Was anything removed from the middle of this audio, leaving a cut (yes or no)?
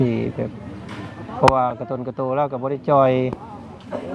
no